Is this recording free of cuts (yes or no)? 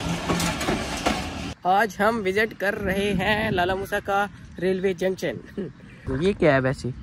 no